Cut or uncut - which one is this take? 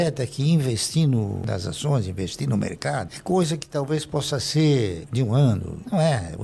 uncut